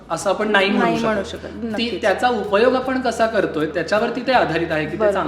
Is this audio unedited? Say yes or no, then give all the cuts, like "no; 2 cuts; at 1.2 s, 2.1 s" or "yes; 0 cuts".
no; 1 cut; at 3.7 s